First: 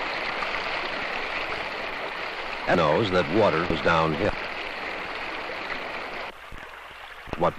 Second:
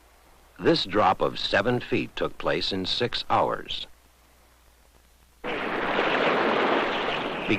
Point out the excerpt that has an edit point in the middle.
first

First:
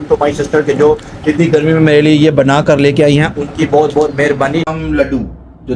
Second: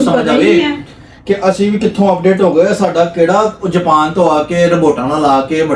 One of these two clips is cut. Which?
first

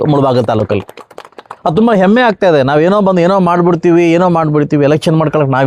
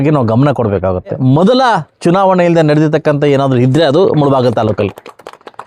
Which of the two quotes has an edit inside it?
second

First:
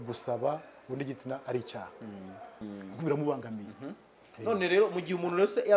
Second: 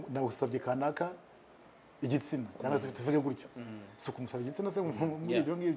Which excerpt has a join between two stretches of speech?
first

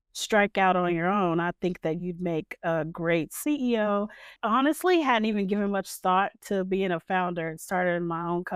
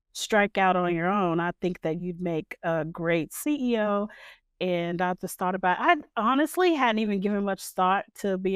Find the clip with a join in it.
first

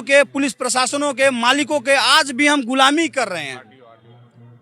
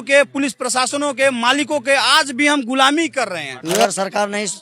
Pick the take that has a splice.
second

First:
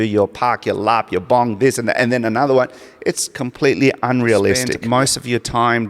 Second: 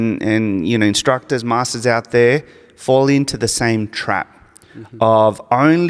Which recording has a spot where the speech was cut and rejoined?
first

